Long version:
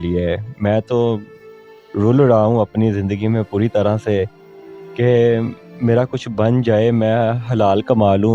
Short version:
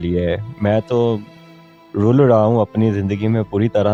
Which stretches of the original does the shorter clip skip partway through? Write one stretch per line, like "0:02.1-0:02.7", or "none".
none

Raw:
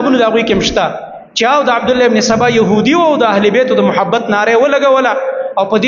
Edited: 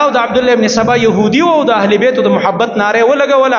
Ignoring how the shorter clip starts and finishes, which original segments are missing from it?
none

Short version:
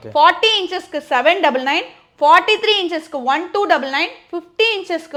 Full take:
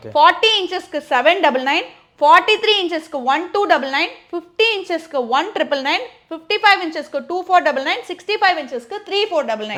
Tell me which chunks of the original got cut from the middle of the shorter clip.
none

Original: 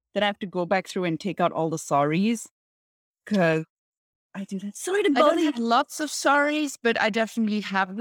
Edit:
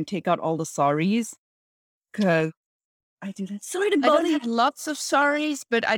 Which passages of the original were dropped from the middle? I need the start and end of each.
none

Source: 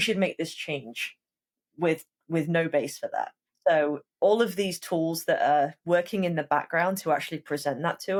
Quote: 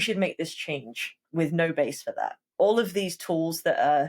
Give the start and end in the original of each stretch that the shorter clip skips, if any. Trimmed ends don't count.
0:01.2-0:02.1
0:03.4-0:04.1

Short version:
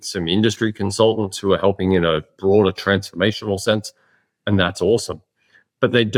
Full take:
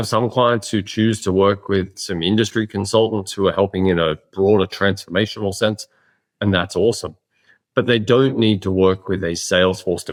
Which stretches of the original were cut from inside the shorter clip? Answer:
none

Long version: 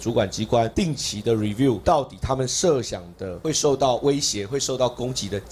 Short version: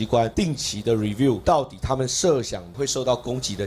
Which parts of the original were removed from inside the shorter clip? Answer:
0:03.0-0:04.4

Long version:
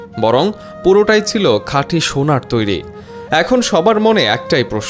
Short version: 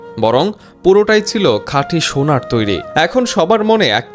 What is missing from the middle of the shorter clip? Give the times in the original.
0:02.8-0:03.2

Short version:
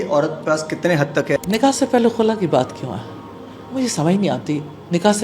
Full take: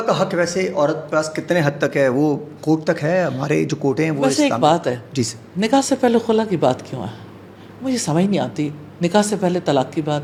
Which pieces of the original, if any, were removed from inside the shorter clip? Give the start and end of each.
0:02.0-0:05.5

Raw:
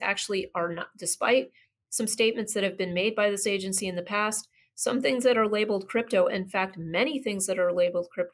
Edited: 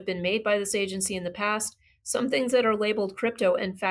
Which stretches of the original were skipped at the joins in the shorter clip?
none

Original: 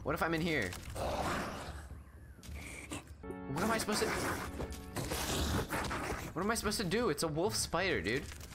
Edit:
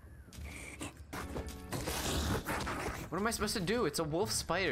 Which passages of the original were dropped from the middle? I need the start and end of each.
0:03.2-0:04.4

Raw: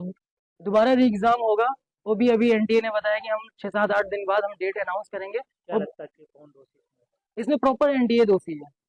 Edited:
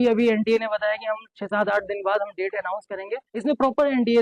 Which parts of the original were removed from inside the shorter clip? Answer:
0:05.5-0:07.3

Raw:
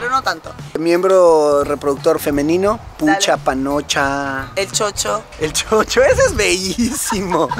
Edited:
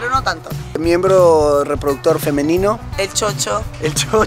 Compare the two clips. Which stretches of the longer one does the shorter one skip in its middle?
0:02.9-0:04.5

